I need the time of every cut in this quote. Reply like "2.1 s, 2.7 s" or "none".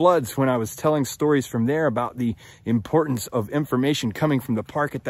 3.3 s